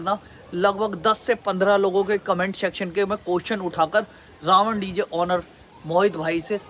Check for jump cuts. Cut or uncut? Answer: uncut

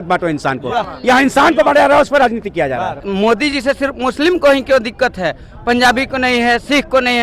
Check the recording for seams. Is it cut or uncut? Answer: cut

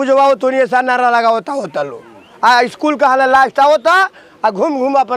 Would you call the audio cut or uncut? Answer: uncut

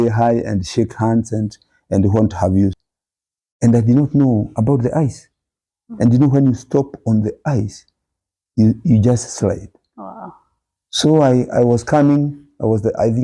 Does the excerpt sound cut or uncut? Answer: cut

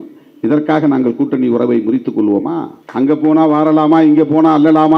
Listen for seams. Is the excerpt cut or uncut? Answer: cut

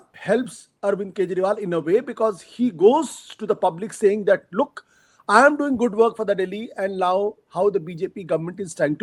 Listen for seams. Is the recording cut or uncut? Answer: uncut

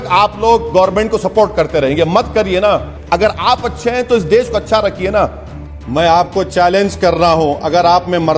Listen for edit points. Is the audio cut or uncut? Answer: cut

